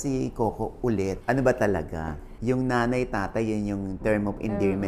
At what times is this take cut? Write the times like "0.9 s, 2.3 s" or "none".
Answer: 1.2 s